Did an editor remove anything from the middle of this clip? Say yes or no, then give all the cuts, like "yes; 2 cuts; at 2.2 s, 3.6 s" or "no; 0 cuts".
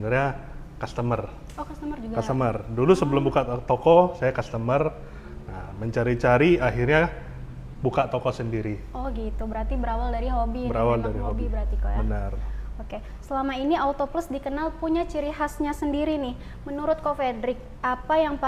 no; 0 cuts